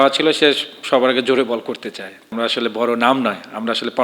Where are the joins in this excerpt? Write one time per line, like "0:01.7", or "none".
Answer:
0:02.3